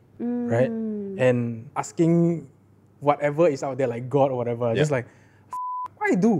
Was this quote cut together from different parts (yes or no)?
yes